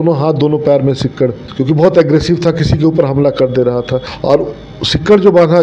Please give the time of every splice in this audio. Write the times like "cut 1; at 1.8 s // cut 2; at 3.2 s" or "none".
cut 1; at 1.4 s // cut 2; at 4.1 s